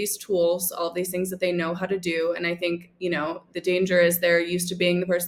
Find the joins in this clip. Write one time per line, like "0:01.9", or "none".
none